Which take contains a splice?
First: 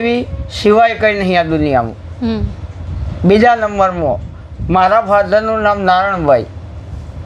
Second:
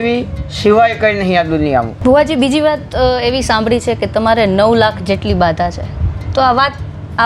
second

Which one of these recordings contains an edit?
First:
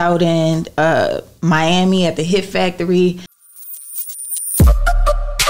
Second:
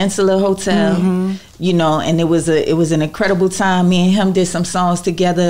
first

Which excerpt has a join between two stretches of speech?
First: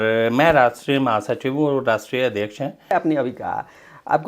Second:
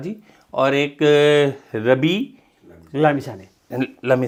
first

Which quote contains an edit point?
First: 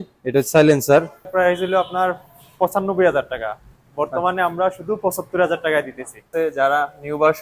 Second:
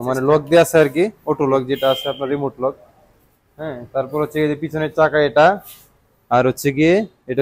first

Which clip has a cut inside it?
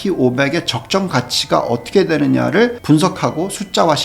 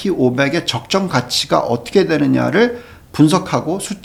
first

